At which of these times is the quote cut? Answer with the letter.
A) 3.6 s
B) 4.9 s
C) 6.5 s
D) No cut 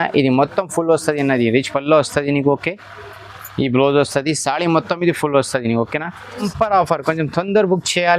C